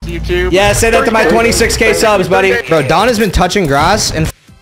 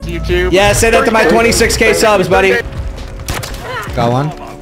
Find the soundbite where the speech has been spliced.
second; 1 cut; at 2.6 s

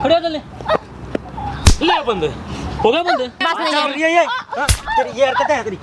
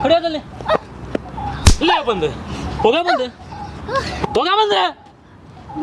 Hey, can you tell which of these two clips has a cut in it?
first; 1 cut; at 3.4 s

